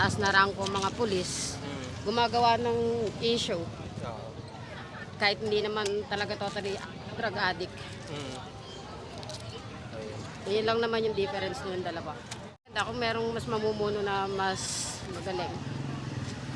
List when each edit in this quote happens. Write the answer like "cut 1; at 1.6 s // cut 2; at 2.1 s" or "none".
cut 1; at 12.7 s